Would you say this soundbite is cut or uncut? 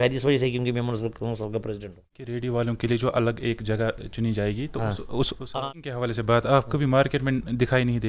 cut